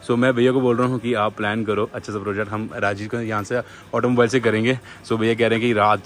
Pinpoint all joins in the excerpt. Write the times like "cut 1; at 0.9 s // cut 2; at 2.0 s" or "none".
none